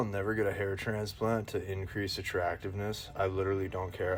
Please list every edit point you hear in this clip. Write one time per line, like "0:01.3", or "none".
none